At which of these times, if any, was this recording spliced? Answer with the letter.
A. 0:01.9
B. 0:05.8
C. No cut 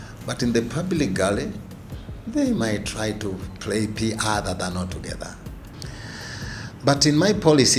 B